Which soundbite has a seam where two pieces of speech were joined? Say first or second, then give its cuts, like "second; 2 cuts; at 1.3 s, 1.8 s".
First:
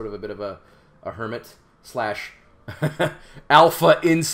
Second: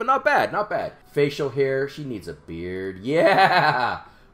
second; 1 cut; at 1.0 s